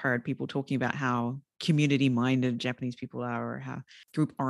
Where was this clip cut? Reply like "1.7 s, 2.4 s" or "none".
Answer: none